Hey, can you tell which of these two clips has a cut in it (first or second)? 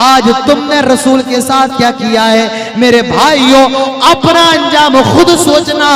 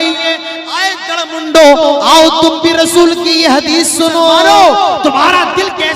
second